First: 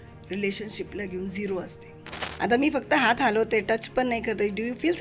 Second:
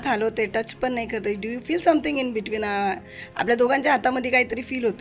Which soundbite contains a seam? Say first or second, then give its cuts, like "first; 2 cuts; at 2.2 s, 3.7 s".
first; 1 cut; at 2.2 s